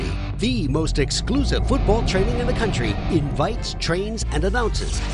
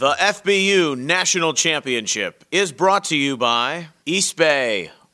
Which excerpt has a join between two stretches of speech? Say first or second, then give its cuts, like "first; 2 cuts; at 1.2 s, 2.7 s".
second; 1 cut; at 3.9 s